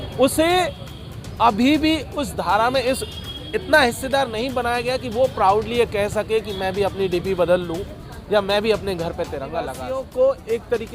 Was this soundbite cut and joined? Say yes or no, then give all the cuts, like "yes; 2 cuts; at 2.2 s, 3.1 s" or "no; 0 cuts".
yes; 1 cut; at 9.8 s